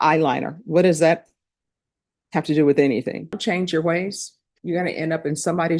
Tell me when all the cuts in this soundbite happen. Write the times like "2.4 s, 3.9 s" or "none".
3.4 s

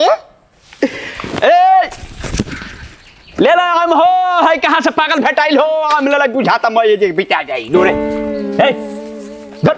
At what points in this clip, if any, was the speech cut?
none

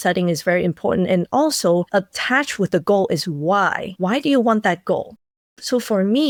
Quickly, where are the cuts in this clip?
none

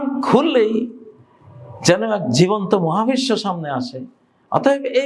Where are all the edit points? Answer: none

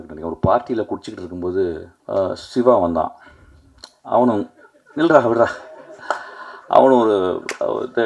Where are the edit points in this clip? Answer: 1.9 s

